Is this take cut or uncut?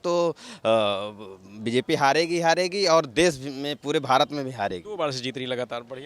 uncut